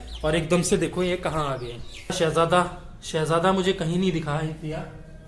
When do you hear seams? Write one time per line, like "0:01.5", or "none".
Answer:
0:02.1